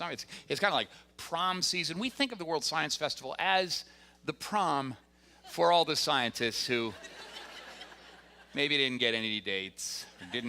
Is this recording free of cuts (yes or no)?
no